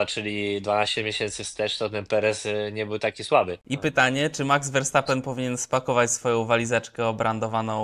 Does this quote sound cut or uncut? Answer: cut